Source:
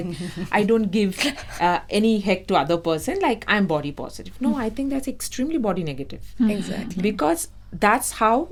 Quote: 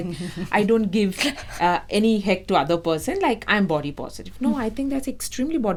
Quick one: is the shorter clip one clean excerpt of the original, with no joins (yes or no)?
yes